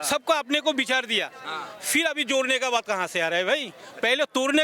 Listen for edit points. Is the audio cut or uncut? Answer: uncut